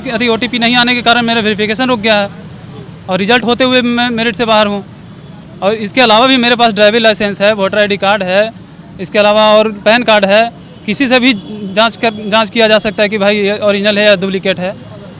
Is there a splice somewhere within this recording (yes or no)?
no